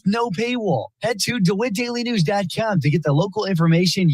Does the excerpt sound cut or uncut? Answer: cut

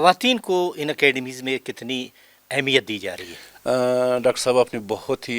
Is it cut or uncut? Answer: uncut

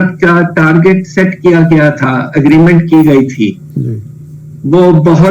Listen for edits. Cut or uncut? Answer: uncut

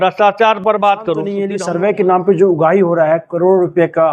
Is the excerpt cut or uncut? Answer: cut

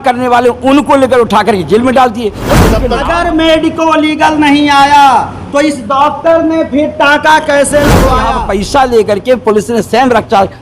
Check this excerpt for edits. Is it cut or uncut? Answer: cut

